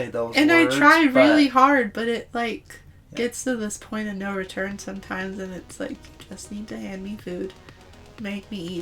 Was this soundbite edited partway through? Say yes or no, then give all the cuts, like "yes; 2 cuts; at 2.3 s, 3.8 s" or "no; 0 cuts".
no; 0 cuts